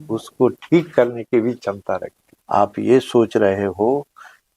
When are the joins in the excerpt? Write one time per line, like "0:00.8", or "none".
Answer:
0:02.4